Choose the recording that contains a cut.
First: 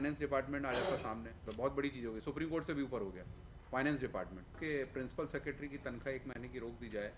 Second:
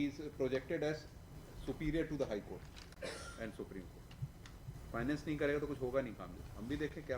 first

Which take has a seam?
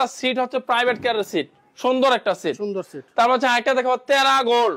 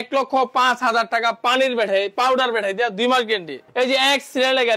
second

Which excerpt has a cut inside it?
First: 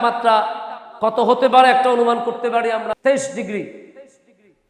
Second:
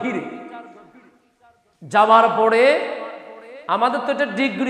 first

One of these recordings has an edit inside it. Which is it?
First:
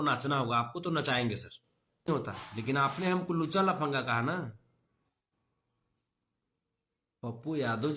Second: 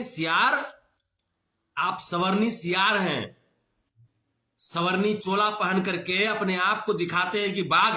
first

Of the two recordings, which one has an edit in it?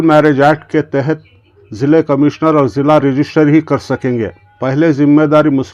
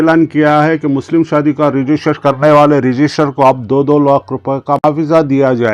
second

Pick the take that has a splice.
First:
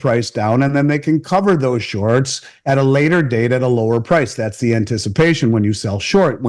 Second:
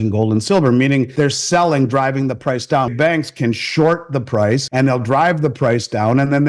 second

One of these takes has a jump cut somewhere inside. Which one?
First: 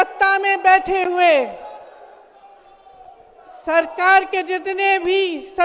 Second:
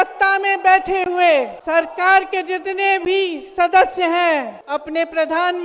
second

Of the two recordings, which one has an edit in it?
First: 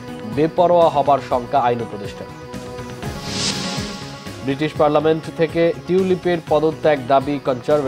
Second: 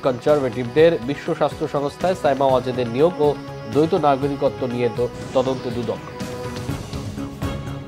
second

